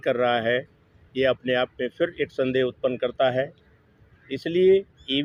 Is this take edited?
no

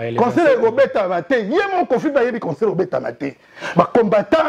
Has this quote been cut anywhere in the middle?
no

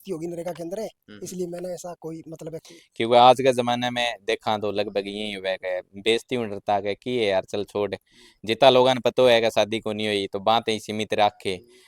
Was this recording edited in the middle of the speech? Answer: yes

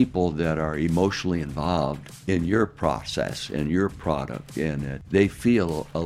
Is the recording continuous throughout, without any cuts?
no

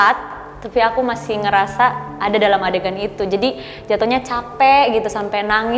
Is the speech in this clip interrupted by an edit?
no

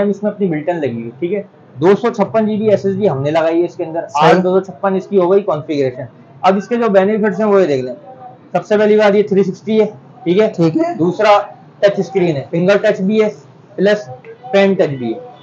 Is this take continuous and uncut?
yes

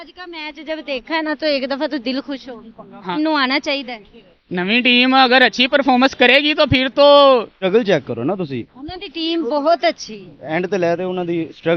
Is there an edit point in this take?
yes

